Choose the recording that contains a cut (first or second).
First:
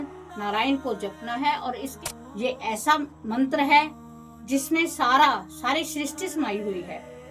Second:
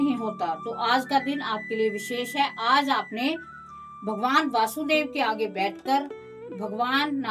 first